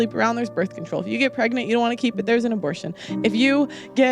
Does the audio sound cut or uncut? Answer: cut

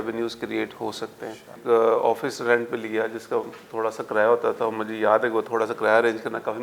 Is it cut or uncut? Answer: cut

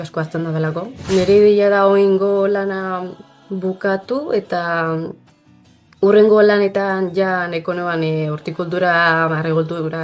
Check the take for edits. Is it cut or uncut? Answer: cut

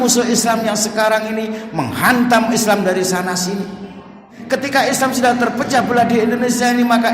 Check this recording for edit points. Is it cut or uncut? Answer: cut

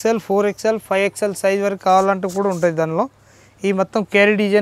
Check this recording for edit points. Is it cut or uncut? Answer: uncut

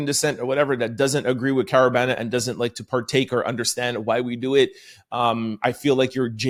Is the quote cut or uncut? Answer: uncut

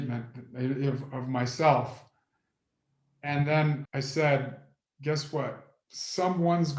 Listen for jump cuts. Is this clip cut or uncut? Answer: cut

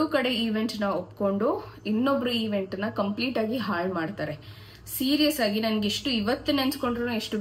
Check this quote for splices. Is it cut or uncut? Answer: uncut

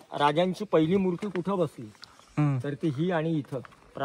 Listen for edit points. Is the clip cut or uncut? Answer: uncut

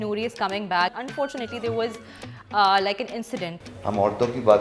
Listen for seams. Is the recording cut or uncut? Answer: cut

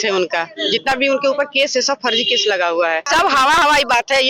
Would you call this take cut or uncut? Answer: cut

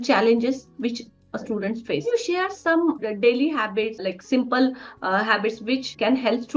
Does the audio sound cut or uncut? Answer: cut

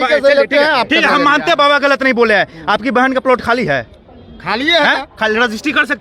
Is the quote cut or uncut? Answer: uncut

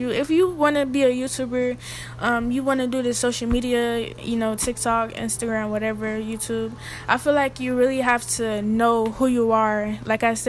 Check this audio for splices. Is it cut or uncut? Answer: uncut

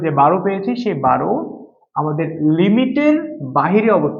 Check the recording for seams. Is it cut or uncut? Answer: uncut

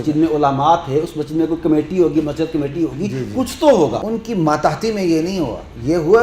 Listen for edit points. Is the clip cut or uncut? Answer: cut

